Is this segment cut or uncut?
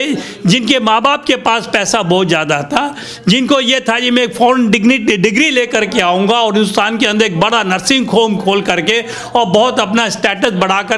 uncut